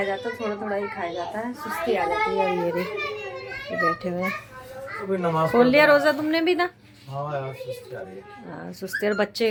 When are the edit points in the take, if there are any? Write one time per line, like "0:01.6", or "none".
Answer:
none

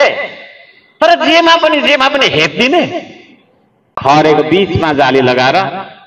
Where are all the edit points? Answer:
0:03.8

